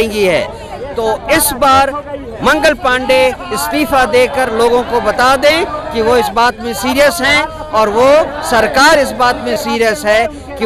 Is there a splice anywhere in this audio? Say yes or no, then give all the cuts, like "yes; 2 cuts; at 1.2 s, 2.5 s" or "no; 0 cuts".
no; 0 cuts